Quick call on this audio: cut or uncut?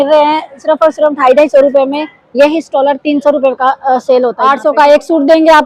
cut